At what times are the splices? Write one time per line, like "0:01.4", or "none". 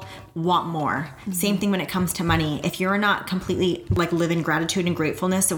0:03.9